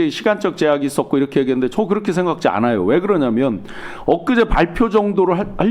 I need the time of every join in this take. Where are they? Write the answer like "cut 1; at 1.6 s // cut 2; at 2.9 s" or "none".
none